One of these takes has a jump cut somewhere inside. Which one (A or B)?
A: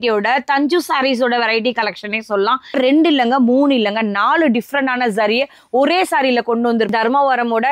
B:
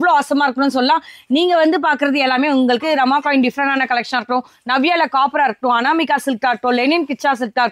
A